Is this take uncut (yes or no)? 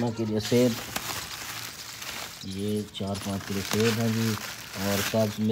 yes